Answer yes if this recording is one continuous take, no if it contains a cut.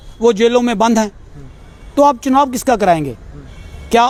yes